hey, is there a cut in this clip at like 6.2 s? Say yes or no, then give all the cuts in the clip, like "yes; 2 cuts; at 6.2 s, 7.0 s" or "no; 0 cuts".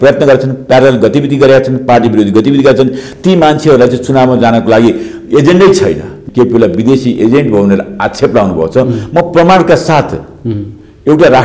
yes; 1 cut; at 6.2 s